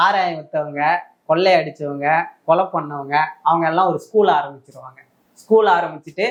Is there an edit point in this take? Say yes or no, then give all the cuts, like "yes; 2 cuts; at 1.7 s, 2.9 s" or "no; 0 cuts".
no; 0 cuts